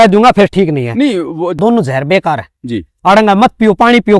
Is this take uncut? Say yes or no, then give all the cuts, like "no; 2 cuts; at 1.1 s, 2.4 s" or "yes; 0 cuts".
no; 1 cut; at 1.5 s